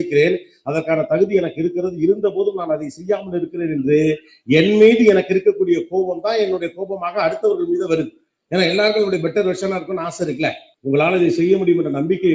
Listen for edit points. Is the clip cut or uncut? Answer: cut